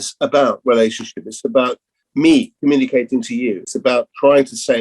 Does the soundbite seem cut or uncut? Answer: cut